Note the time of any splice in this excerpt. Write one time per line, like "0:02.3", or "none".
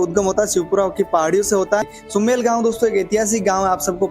0:02.0